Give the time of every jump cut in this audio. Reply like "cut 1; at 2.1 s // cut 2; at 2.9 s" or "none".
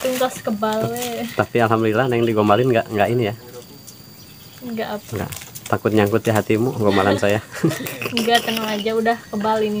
none